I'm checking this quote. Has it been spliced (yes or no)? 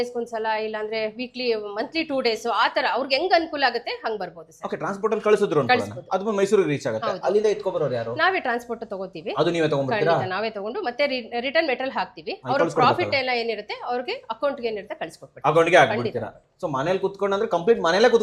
no